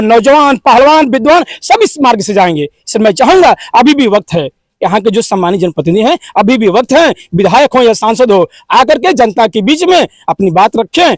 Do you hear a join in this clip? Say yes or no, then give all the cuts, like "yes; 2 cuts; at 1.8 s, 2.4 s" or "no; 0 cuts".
no; 0 cuts